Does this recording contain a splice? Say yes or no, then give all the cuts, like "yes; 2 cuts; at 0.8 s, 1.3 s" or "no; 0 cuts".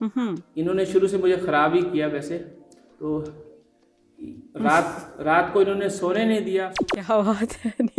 yes; 1 cut; at 6.7 s